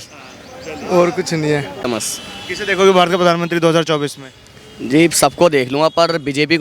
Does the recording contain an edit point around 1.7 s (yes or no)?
no